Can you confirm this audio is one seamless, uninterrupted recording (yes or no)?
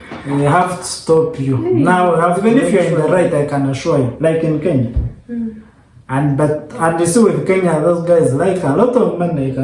no